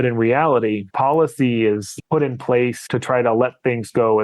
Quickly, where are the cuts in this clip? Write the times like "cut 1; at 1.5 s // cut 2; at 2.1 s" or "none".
cut 1; at 0.9 s // cut 2; at 1.9 s // cut 3; at 2.8 s